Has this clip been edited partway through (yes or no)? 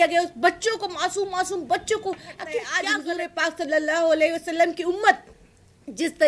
yes